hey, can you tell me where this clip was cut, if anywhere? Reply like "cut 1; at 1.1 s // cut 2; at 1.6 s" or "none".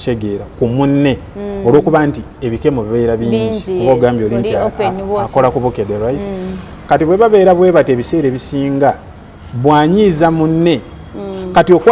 none